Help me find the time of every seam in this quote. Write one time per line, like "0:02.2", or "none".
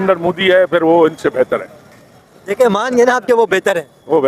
none